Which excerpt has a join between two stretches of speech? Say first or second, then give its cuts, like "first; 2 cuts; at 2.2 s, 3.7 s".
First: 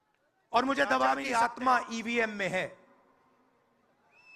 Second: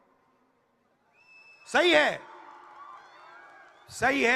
first; 1 cut; at 1.2 s